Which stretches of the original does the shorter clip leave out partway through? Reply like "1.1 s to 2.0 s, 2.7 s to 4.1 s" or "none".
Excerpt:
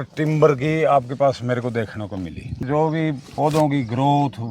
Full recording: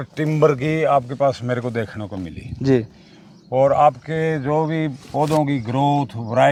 2.6 s to 4.4 s